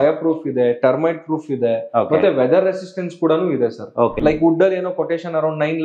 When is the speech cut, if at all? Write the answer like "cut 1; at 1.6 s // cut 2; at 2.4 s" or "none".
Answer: cut 1; at 4.1 s

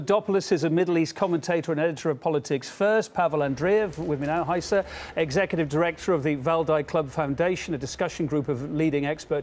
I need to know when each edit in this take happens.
none

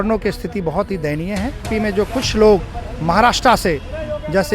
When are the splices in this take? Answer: cut 1; at 1.7 s

